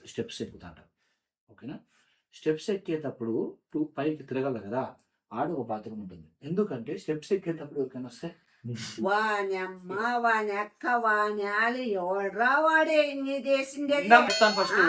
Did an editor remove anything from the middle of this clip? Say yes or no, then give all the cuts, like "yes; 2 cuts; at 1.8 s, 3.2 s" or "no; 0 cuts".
no; 0 cuts